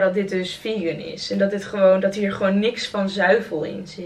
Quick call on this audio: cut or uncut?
uncut